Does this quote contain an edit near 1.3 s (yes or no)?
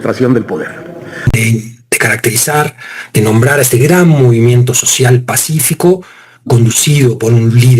yes